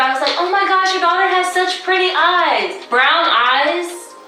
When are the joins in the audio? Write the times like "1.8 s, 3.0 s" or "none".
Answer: 2.4 s